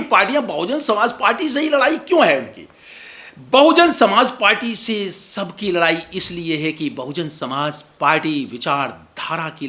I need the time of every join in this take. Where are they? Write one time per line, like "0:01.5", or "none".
none